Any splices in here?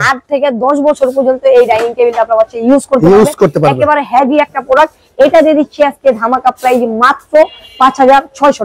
no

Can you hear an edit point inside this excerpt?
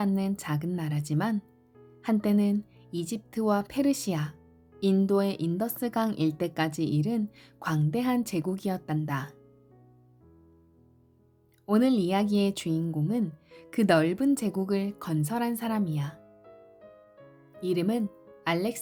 no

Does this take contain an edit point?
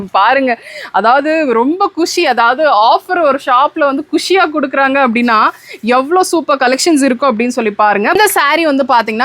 yes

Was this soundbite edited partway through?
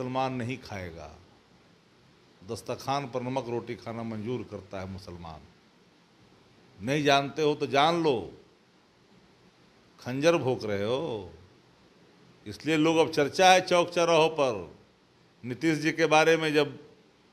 no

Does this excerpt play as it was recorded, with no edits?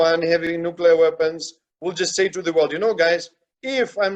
yes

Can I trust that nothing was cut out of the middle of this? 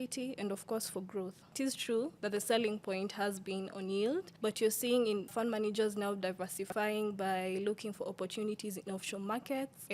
no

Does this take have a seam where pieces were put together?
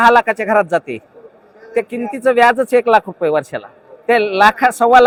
no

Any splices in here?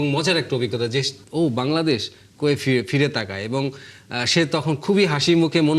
yes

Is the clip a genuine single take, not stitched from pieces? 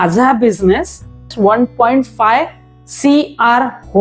no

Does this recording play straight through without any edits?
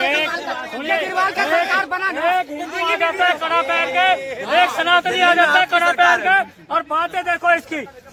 yes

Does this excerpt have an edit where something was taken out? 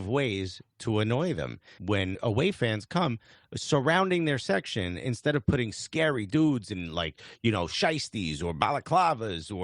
yes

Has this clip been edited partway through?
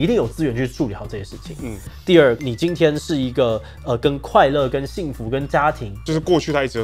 yes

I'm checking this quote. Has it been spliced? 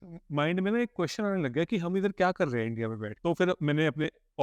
yes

